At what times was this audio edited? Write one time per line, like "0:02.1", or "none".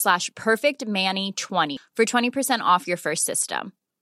0:01.8